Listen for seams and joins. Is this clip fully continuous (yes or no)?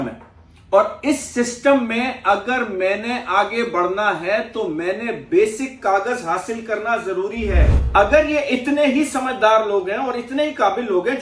no